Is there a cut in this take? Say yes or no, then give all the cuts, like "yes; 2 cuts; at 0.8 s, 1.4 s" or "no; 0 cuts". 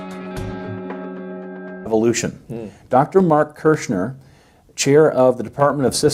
no; 0 cuts